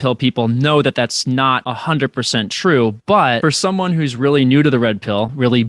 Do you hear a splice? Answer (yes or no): yes